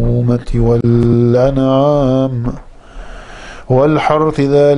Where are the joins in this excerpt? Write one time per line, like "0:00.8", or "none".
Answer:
0:02.0